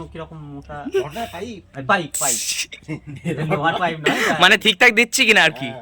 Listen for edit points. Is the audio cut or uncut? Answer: uncut